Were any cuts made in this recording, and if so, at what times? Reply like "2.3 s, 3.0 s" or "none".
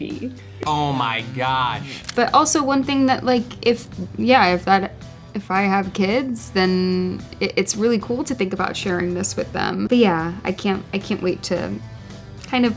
2.1 s, 9.9 s

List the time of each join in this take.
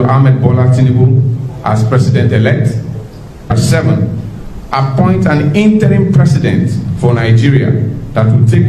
3.5 s

